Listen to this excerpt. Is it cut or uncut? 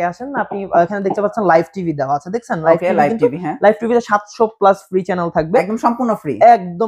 uncut